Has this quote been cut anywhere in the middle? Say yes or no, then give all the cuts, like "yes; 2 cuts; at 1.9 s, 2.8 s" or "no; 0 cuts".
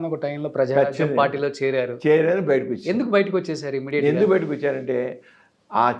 no; 0 cuts